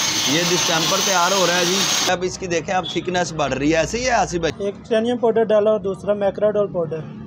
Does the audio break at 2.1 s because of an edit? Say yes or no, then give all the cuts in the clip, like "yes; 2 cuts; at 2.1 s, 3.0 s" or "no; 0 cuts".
yes; 2 cuts; at 2.1 s, 4.6 s